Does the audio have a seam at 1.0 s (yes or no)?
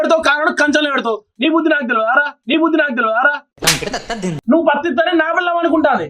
no